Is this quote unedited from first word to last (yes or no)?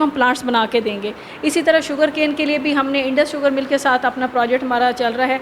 yes